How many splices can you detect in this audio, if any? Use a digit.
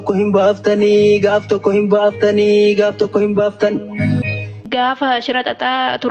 1